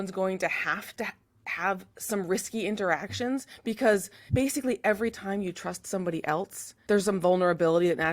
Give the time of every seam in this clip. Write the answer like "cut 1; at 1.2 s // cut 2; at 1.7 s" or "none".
cut 1; at 4.2 s // cut 2; at 6.7 s